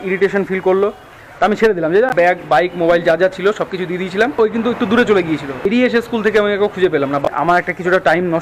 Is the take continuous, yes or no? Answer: no